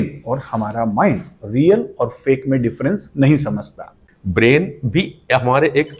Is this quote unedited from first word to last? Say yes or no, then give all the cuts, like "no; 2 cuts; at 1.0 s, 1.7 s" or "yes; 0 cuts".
no; 1 cut; at 3.9 s